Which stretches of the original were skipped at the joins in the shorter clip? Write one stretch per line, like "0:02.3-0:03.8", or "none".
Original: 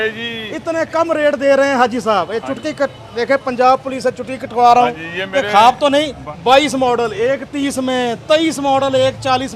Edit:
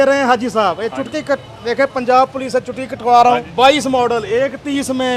0:05.0-0:06.4